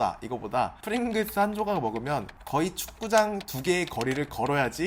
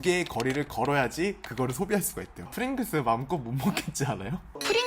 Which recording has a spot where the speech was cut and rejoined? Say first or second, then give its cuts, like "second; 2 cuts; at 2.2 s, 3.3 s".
second; 1 cut; at 2.5 s